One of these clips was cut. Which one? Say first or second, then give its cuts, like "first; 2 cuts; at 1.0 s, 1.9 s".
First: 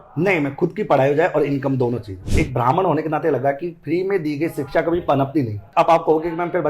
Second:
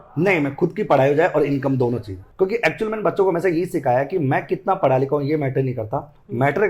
first; 2 cuts; at 2.3 s, 5.6 s